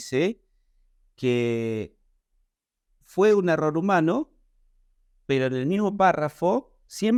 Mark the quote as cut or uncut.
uncut